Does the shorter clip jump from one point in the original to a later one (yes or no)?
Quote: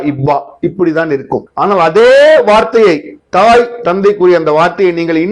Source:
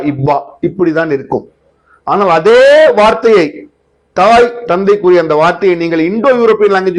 yes